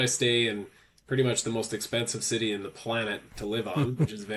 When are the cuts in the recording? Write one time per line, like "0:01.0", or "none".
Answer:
none